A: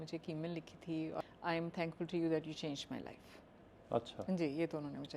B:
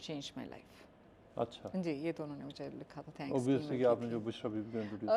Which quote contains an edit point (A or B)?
A